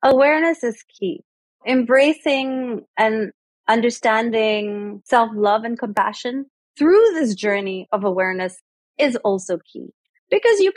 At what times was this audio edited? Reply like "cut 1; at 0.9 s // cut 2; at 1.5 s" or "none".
cut 1; at 1.6 s // cut 2; at 2.8 s // cut 3; at 4.9 s